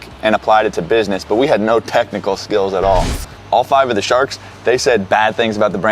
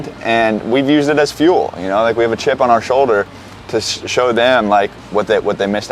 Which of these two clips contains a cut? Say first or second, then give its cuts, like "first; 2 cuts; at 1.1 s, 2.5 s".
first; 1 cut; at 3.4 s